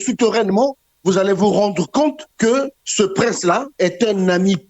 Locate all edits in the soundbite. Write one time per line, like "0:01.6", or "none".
0:02.5
0:03.7